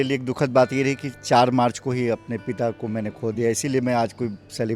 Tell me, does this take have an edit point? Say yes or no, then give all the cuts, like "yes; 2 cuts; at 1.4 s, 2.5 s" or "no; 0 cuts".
no; 0 cuts